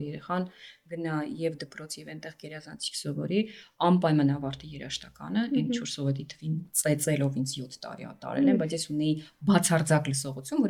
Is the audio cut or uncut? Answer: uncut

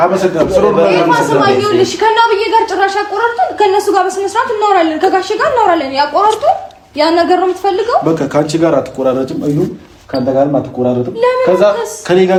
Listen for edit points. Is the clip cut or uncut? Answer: uncut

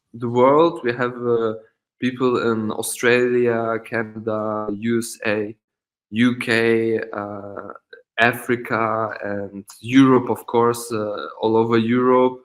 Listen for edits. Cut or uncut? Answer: uncut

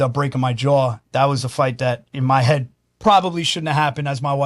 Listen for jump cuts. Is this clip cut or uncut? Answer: cut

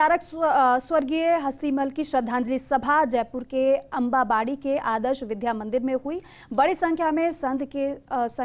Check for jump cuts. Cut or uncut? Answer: uncut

